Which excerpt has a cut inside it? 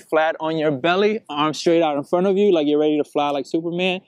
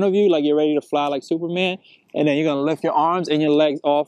second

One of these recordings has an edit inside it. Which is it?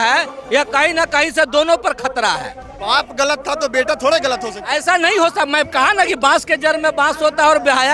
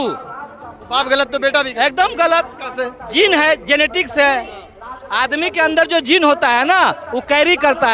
first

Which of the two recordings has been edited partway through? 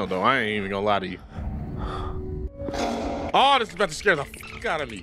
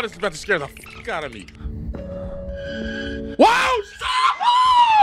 first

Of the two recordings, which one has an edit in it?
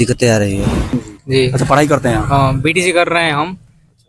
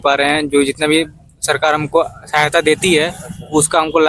first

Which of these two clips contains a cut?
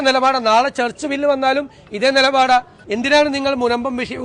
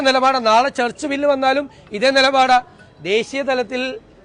first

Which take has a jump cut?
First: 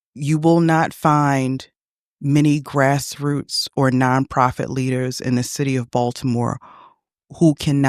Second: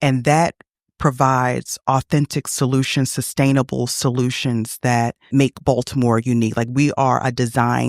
second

